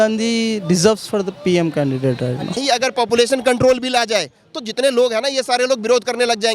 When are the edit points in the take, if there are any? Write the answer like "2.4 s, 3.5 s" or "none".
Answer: 2.6 s